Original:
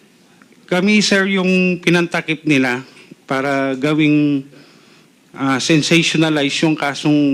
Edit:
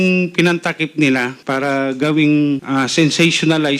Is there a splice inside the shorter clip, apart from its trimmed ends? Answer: yes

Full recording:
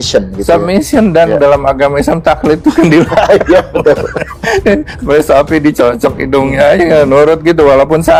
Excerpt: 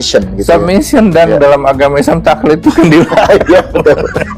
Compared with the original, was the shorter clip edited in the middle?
no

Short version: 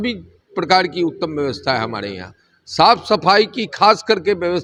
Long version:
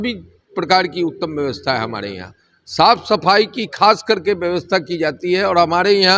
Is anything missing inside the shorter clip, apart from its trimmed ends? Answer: no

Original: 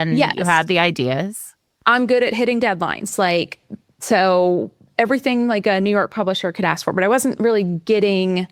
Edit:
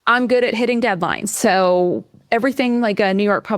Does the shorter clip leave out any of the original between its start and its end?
yes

